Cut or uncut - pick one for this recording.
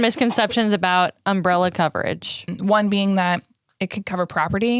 cut